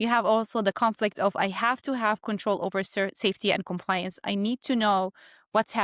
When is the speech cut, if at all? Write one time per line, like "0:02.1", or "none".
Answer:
none